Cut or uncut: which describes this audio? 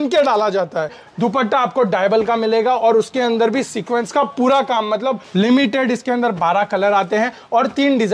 cut